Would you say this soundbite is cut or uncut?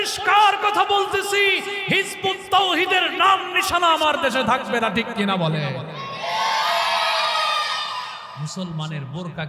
cut